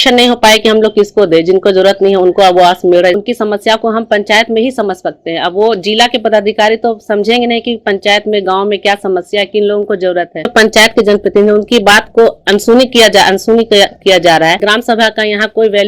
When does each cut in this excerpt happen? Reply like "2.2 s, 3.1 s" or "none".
3.2 s, 10.5 s, 14.6 s